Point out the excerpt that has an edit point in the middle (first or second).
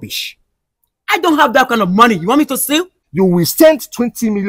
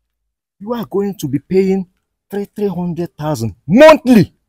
first